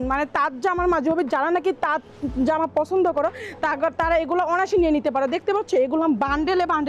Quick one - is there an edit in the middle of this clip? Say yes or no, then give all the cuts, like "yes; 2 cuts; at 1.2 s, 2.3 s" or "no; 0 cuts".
no; 0 cuts